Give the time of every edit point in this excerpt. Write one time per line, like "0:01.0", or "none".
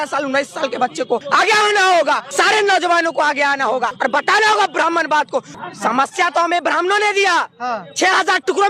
0:01.2
0:02.3
0:03.9
0:05.5